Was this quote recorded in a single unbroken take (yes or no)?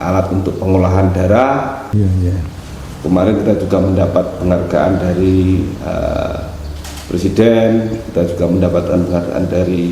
no